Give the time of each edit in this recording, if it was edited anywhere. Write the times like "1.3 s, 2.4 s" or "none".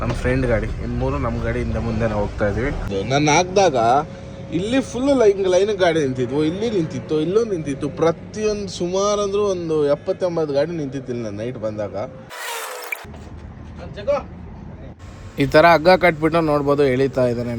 2.9 s, 12.3 s